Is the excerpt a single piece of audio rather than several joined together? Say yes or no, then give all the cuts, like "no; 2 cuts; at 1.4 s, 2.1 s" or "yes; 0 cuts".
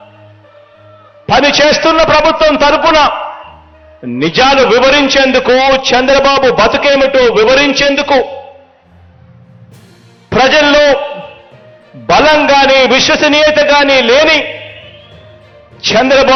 yes; 0 cuts